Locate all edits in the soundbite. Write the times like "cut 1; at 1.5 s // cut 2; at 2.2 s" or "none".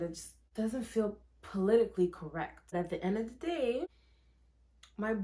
cut 1; at 2.7 s